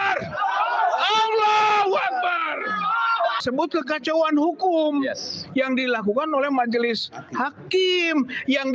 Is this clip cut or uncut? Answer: cut